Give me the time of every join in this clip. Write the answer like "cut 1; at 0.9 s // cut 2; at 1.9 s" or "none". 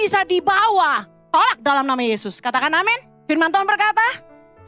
cut 1; at 3.1 s